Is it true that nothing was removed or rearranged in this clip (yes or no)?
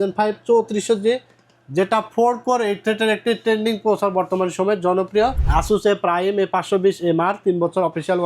no